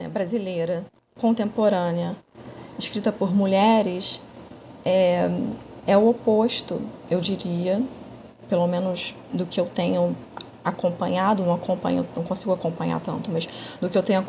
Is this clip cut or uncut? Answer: uncut